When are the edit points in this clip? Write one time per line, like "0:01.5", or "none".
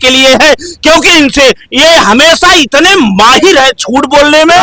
none